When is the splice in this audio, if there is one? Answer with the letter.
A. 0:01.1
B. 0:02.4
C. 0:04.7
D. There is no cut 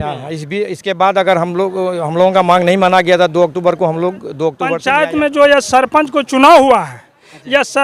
C